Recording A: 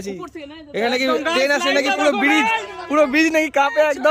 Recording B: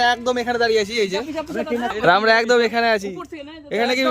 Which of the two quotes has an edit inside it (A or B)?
B